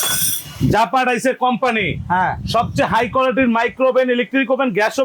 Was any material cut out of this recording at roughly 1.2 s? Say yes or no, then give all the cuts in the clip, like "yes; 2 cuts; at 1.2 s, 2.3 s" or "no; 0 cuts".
no; 0 cuts